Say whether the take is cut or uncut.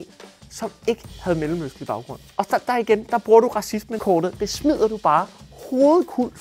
uncut